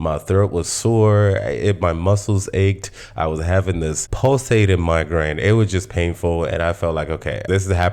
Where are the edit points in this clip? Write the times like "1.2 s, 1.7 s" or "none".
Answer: none